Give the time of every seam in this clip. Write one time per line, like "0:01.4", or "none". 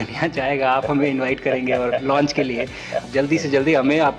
0:03.1